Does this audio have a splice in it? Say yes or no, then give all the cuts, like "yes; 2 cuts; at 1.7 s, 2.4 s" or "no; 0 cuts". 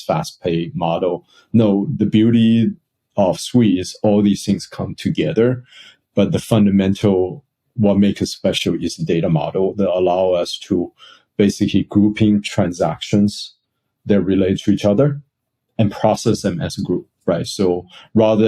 yes; 1 cut; at 1.9 s